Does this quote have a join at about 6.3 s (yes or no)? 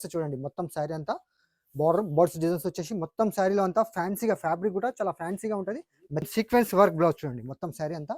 yes